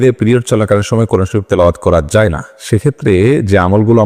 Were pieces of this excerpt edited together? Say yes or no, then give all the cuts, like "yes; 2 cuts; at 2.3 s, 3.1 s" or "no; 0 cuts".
no; 0 cuts